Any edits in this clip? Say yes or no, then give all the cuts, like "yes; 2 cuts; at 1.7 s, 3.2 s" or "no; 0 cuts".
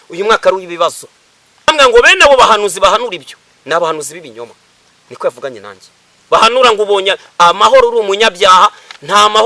yes; 1 cut; at 1.7 s